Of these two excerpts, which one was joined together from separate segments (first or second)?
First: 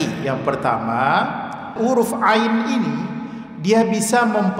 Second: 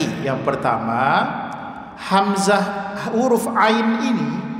first